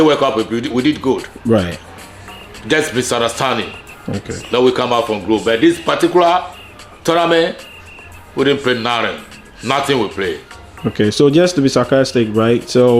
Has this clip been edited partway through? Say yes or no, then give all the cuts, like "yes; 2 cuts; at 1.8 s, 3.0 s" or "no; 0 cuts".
no; 0 cuts